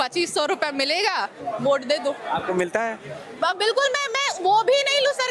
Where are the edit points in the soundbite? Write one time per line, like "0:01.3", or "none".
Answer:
none